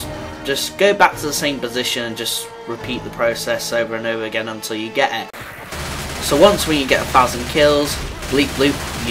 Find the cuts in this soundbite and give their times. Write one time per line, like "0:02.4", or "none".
0:05.1